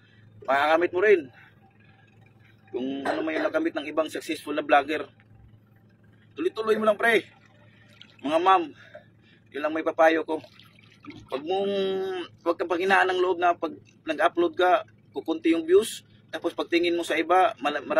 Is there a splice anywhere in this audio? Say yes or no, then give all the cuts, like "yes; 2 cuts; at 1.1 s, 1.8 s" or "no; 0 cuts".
no; 0 cuts